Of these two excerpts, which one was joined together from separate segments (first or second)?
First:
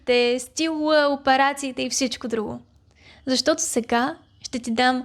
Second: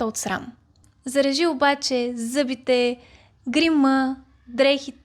second